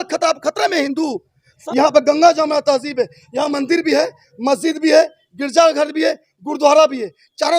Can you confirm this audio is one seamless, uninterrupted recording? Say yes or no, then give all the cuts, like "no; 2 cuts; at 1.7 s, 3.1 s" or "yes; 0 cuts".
no; 1 cut; at 1.6 s